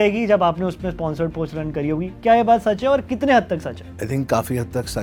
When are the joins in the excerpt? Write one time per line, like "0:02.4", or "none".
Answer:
none